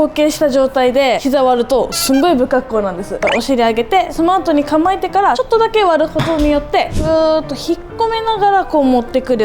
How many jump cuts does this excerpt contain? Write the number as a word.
five